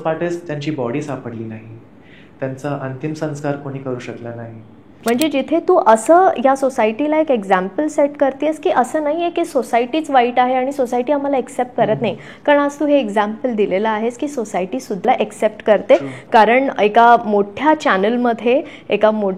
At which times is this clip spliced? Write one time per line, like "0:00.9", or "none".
0:04.9
0:15.1